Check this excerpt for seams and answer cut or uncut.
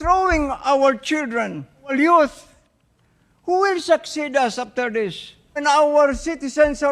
cut